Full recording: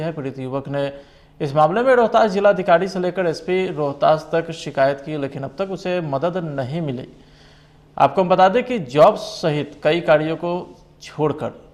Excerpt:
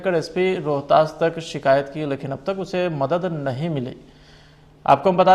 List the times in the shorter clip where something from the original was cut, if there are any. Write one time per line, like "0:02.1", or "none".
none